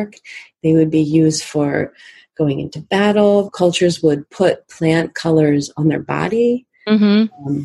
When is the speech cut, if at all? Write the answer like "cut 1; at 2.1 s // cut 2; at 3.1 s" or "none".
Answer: none

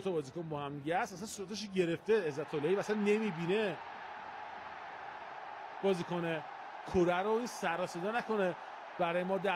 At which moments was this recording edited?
none

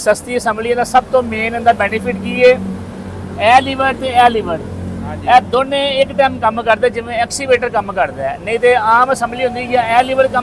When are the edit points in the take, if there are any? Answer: none

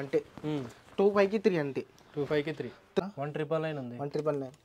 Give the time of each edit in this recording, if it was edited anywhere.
cut 1; at 3.0 s

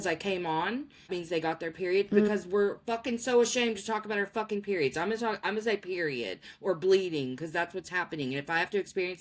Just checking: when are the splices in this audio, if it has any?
cut 1; at 1.1 s

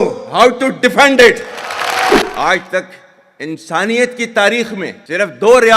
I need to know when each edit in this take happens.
cut 1; at 2.2 s

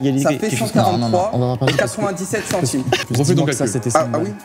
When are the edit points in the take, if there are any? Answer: cut 1; at 3.0 s

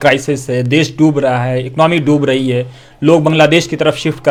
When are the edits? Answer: none

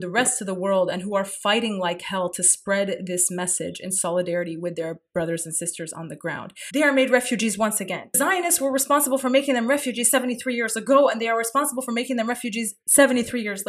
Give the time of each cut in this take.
cut 1; at 6.5 s // cut 2; at 8.2 s // cut 3; at 12.8 s

